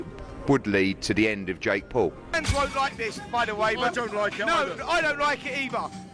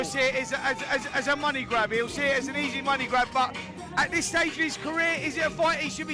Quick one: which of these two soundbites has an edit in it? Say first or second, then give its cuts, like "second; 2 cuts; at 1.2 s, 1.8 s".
first; 1 cut; at 2.4 s